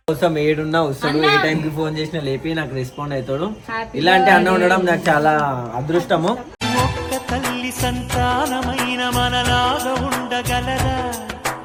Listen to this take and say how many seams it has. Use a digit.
0